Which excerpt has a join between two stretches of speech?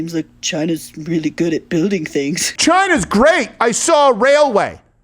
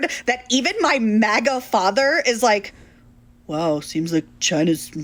first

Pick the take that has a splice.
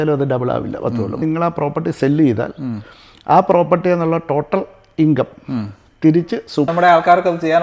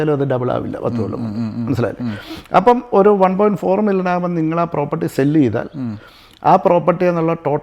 first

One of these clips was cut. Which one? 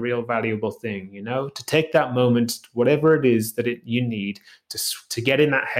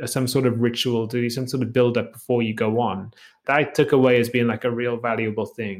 second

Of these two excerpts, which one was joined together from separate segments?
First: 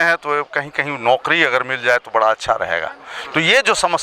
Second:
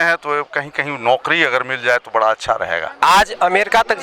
second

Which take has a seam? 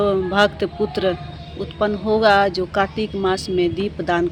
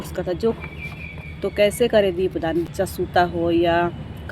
second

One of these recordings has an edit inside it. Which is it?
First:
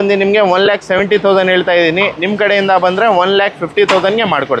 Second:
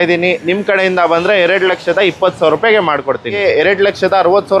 second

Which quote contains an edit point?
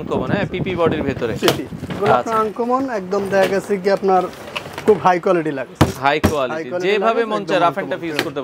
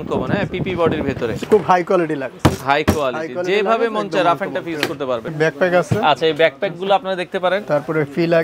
second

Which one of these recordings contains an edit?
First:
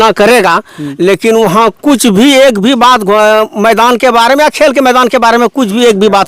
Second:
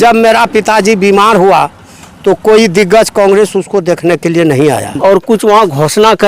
second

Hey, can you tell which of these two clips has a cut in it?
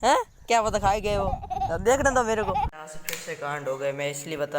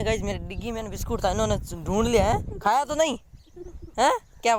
first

